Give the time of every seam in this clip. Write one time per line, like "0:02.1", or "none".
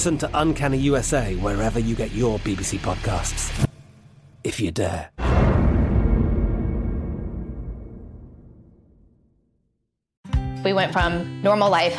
0:10.2